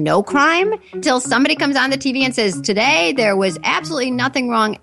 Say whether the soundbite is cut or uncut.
cut